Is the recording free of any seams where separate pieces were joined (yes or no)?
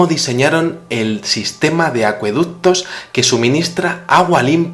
yes